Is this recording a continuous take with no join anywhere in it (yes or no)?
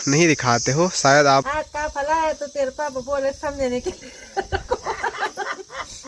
no